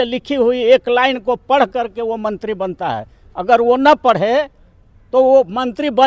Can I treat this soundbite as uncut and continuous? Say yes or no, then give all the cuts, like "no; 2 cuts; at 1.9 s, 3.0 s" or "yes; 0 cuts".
yes; 0 cuts